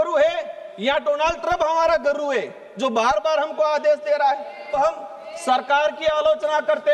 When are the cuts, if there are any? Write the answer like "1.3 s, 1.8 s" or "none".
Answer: 4.7 s